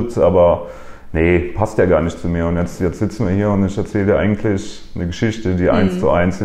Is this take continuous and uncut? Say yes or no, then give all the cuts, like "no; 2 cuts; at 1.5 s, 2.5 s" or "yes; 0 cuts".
yes; 0 cuts